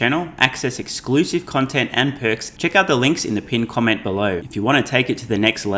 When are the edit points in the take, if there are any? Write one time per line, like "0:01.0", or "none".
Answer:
0:02.5
0:04.4